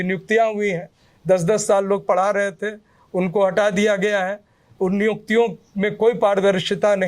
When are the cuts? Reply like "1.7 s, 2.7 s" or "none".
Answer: none